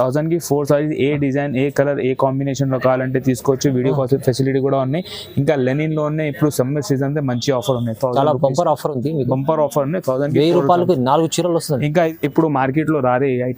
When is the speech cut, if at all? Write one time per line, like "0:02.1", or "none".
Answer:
0:12.1

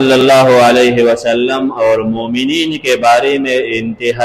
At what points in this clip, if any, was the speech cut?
none

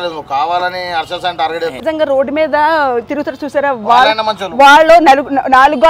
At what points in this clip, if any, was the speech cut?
0:01.8

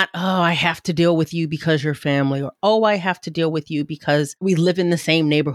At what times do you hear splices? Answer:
0:04.4

